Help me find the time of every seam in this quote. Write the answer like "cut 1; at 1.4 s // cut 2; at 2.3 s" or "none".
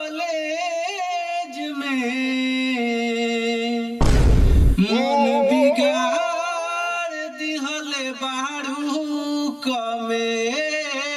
none

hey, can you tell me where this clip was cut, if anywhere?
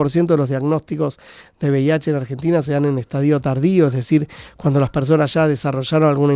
none

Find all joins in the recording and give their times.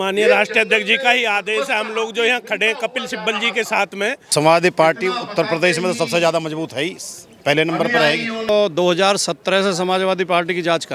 cut 1; at 4.3 s // cut 2; at 8.5 s

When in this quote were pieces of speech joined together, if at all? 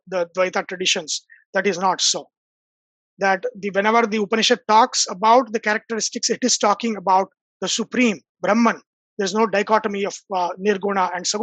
none

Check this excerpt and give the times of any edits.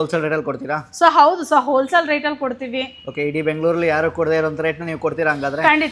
none

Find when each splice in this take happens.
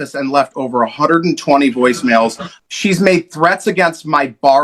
cut 1; at 2.5 s

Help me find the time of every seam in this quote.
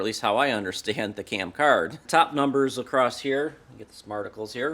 cut 1; at 2.0 s

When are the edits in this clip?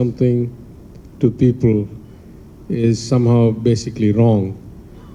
none

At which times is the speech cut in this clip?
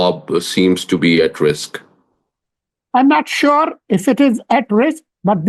none

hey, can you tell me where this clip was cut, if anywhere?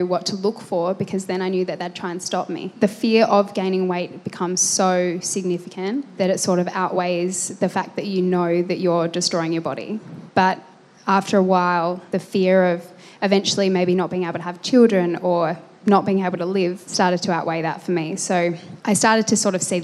cut 1; at 2.7 s // cut 2; at 16.9 s

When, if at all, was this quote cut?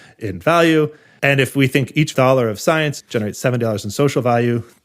cut 1; at 1.0 s // cut 2; at 3.0 s

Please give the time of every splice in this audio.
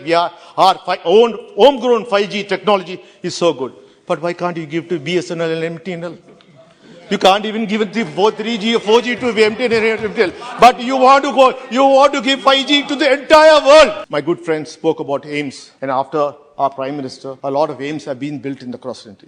cut 1; at 14.0 s // cut 2; at 15.6 s // cut 3; at 17.2 s

